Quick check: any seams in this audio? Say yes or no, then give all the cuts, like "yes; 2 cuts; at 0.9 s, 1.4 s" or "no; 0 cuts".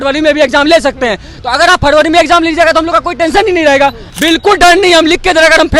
yes; 1 cut; at 4.0 s